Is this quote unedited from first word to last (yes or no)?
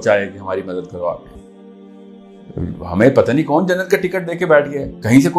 no